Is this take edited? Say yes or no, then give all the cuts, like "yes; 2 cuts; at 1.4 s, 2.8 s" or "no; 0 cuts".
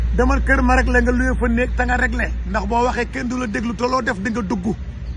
no; 0 cuts